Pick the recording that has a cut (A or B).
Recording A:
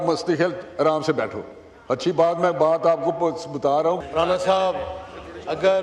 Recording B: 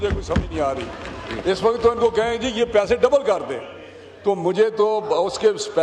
A